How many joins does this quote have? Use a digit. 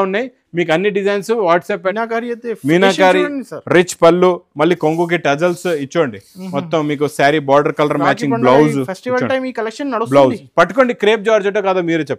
1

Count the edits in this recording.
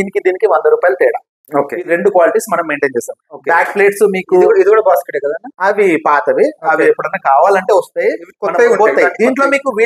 0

